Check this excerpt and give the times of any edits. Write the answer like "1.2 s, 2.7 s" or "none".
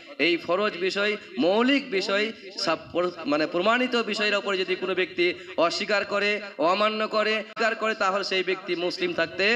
7.5 s